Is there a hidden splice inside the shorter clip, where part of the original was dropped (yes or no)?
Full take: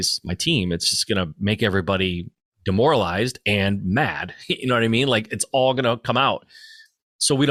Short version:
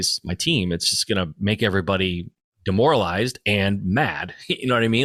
no